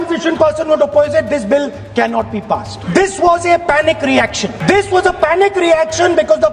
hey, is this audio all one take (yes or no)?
no